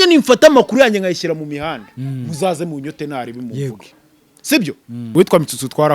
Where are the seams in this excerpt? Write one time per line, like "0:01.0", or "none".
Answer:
0:05.1